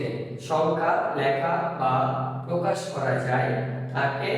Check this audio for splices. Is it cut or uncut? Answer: uncut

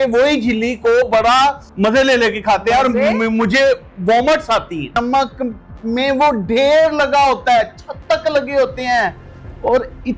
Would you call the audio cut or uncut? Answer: cut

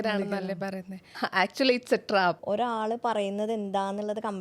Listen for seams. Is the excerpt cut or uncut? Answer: cut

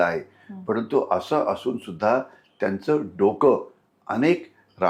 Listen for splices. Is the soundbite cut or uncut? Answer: uncut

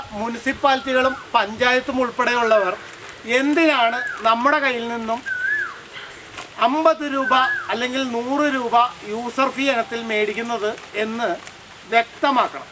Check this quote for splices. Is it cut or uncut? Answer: uncut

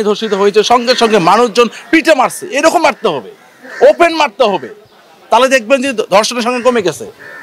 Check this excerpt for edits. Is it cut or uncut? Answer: uncut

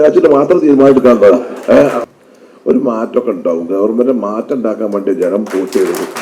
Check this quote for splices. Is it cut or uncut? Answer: cut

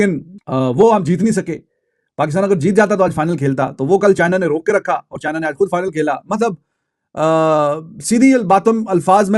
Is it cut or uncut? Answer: uncut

